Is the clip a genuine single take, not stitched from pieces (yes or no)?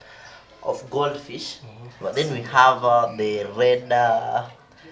no